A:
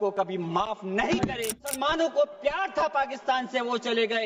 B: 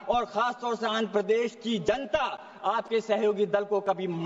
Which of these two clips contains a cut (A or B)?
A